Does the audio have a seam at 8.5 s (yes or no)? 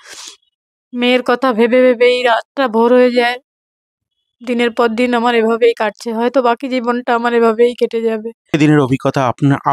yes